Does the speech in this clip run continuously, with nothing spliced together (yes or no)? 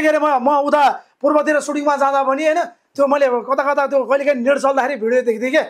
yes